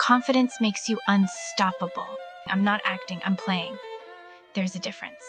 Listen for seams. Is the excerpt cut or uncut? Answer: cut